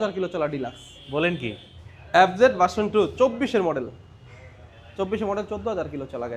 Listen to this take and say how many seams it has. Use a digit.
0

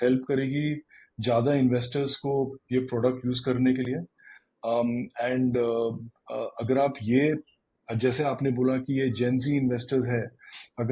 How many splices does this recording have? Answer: 0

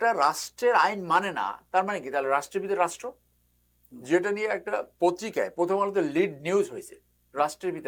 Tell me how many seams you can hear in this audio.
0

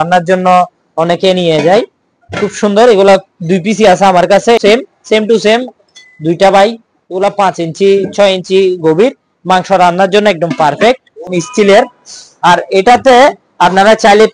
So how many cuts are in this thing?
2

